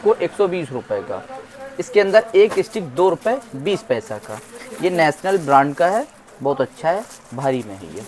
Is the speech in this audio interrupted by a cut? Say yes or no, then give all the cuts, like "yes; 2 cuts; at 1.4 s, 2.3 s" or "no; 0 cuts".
no; 0 cuts